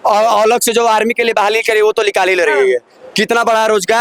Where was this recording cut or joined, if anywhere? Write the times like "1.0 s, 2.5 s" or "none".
none